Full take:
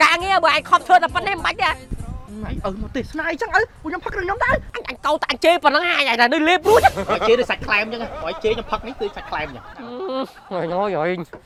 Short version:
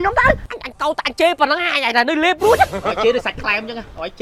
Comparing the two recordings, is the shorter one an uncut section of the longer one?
yes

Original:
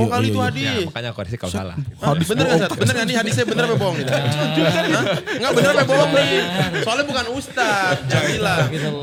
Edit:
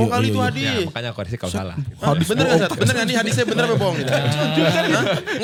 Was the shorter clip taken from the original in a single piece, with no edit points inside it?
yes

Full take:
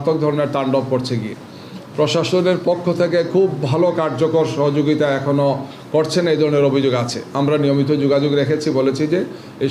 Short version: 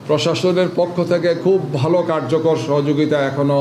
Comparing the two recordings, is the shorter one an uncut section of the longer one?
yes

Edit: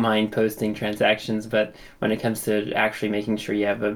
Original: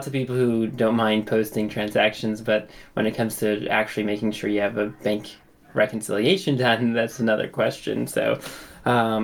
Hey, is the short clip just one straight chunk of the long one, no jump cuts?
yes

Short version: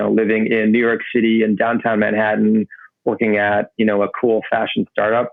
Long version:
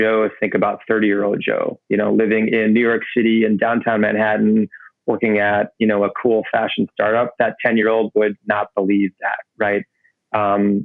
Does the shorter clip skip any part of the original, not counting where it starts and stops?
no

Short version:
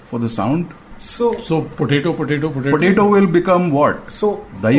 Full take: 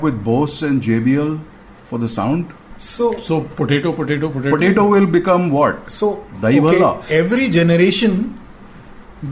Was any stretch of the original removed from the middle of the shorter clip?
no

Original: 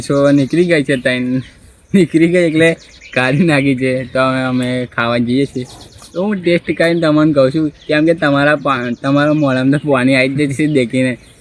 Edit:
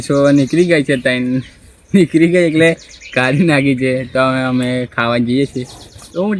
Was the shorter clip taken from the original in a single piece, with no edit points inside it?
yes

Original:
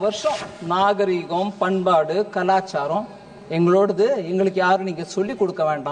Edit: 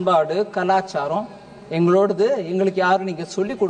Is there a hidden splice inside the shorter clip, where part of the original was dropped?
no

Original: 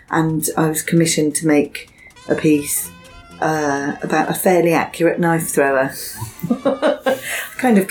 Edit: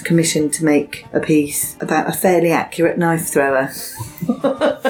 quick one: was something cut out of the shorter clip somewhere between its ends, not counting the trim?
yes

